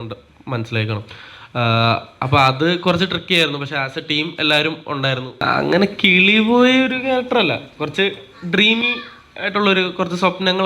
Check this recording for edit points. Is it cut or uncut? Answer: cut